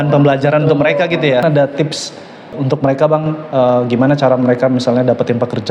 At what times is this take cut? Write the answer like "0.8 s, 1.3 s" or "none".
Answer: 1.4 s, 2.5 s